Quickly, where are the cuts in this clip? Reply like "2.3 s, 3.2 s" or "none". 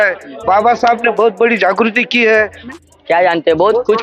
2.7 s